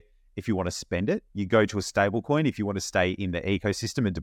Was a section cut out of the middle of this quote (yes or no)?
yes